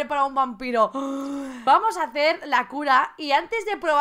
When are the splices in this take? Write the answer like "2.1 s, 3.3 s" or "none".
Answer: 1.5 s